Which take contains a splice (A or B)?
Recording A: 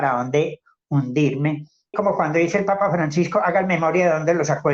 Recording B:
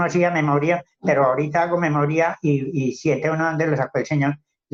A